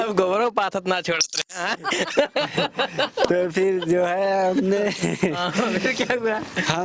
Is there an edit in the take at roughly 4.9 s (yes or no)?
no